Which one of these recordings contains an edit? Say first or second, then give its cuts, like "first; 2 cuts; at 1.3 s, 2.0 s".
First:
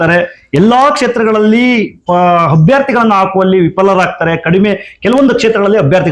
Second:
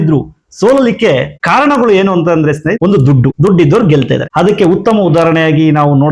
second; 3 cuts; at 1.3 s, 3.2 s, 4.3 s